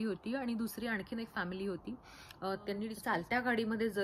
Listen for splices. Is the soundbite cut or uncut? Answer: cut